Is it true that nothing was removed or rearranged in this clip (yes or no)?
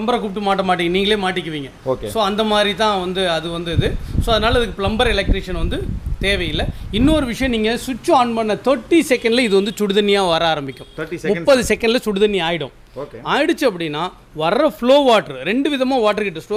yes